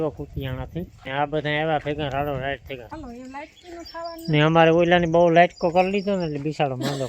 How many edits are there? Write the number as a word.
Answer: two